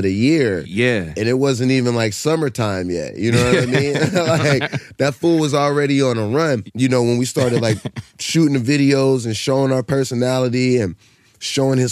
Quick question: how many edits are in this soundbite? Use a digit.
1